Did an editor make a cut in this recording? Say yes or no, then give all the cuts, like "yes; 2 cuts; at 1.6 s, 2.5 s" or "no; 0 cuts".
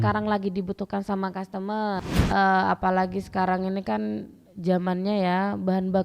yes; 1 cut; at 2.0 s